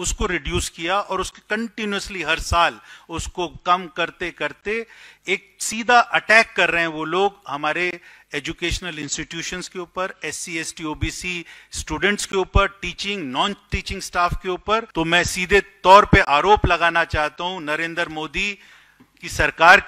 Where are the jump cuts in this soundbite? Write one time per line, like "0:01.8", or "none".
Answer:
0:14.9

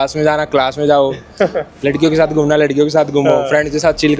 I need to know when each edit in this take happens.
none

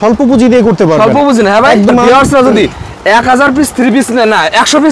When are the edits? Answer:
0:01.9

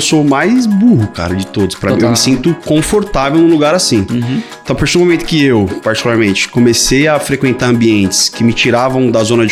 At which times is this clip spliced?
none

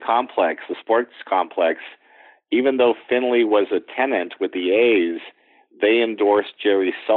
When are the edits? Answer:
none

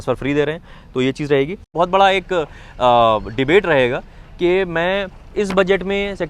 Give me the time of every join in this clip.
0:01.7

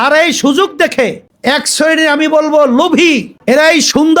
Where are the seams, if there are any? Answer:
none

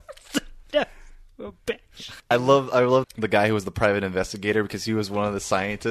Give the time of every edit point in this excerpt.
0:02.1
0:03.1

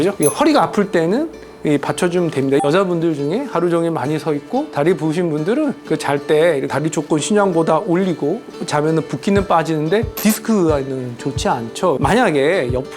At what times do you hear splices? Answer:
0:02.6
0:12.0

